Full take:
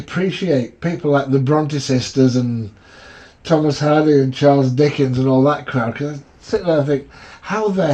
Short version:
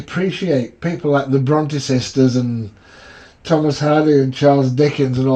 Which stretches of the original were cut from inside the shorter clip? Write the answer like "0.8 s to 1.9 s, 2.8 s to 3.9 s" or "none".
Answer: none